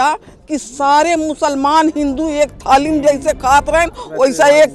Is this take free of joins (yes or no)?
yes